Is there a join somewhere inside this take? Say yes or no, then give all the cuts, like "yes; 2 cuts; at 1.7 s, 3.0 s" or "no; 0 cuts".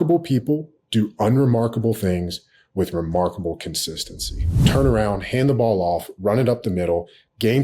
yes; 1 cut; at 4.5 s